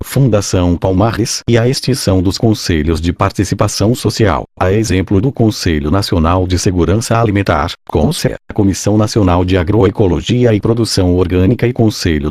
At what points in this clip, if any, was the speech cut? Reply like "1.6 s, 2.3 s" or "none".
5.3 s, 6.6 s, 7.9 s